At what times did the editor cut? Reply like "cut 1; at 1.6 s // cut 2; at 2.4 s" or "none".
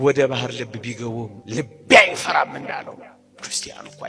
cut 1; at 1.4 s